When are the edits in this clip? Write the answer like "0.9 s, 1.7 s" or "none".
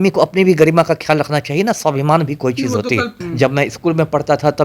3.2 s

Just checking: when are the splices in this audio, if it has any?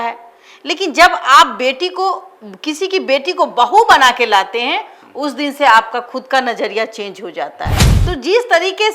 7.9 s

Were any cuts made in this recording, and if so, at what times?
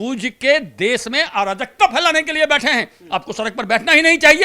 none

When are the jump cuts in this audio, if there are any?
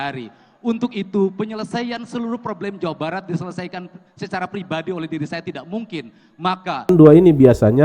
6.9 s

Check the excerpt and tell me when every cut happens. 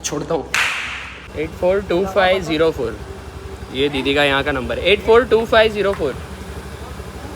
1.2 s

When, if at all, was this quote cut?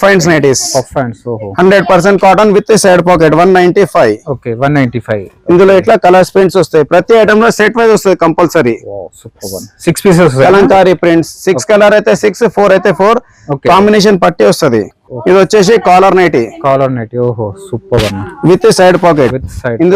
none

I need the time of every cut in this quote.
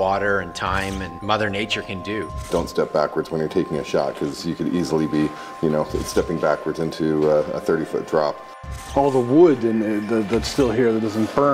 1.2 s, 2.5 s, 8.6 s

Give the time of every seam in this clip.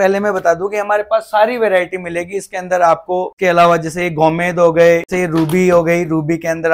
3.3 s, 5.1 s

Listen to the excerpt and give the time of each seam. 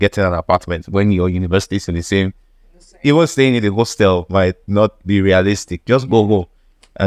none

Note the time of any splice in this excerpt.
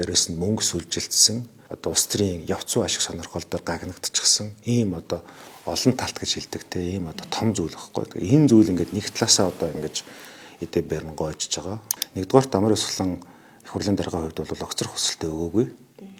none

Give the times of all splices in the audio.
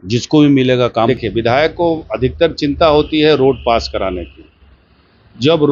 1.1 s

